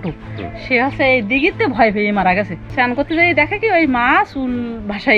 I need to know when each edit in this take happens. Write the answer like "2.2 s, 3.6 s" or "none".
2.7 s